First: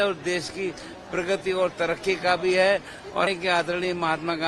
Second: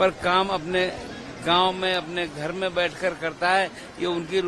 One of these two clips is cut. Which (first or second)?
first